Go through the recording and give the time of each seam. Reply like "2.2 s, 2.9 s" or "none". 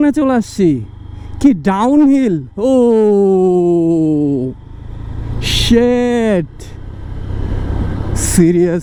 none